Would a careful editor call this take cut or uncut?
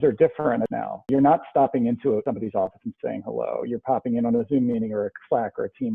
cut